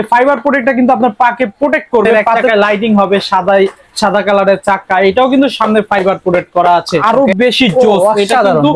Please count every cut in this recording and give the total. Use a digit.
2